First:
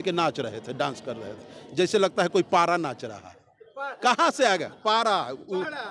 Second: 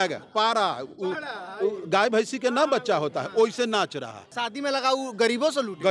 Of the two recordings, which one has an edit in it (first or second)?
second